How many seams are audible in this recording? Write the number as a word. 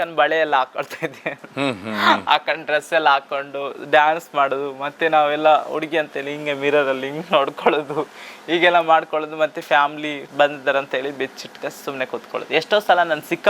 zero